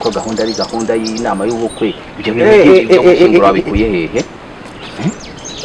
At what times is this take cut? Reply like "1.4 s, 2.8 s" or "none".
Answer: none